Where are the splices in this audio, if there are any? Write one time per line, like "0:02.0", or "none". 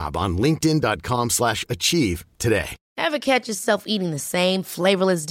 0:02.8